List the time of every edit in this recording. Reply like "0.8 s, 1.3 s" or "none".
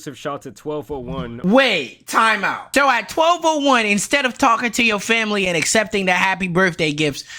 1.3 s